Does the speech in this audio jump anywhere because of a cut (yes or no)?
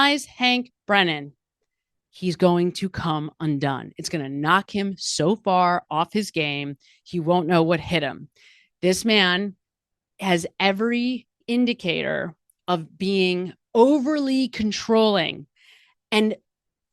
yes